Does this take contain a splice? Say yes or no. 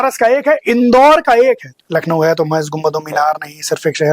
yes